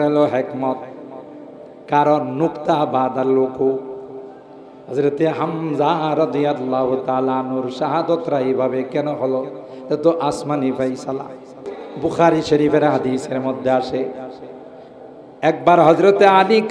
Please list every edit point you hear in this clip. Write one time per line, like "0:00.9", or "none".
0:11.8